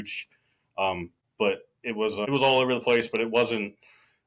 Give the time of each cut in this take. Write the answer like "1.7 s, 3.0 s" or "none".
1.2 s, 2.2 s